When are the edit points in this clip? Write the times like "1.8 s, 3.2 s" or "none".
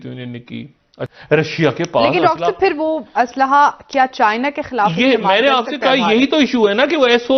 1.0 s